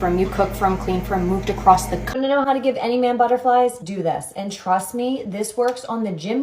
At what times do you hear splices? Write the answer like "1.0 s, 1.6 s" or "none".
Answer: 2.0 s